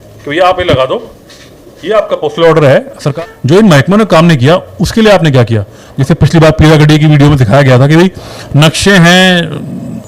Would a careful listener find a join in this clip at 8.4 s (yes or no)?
no